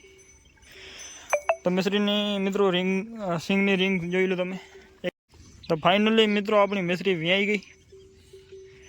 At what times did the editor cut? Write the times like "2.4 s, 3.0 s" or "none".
5.1 s